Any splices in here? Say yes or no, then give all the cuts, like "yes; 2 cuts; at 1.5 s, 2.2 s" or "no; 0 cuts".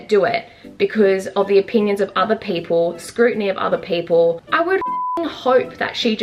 no; 0 cuts